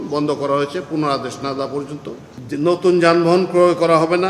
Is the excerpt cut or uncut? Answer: cut